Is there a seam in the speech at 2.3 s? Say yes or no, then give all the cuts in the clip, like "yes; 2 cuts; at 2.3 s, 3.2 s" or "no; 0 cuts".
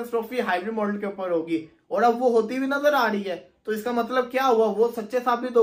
no; 0 cuts